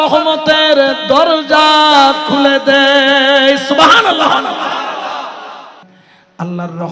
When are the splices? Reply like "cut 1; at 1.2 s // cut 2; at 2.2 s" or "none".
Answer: cut 1; at 5.8 s